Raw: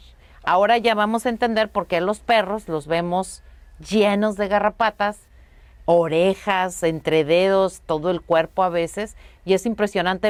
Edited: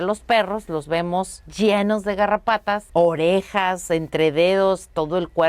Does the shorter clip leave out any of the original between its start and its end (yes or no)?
yes